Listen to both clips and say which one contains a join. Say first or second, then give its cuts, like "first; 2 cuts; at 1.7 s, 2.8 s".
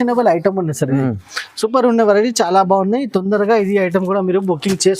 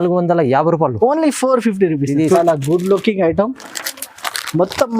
second; 1 cut; at 2.4 s